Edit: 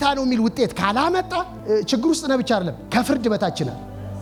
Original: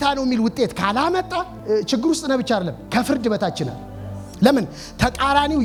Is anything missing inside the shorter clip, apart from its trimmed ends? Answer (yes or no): no